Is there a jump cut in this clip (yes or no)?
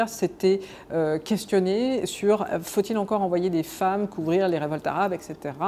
no